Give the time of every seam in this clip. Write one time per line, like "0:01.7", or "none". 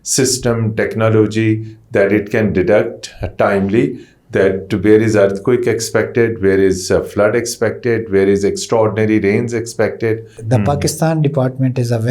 0:10.4